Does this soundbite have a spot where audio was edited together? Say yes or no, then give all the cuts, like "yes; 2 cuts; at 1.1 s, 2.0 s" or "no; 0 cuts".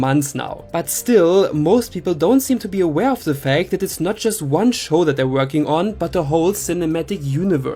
no; 0 cuts